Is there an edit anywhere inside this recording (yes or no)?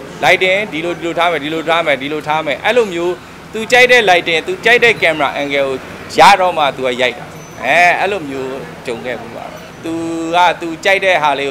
yes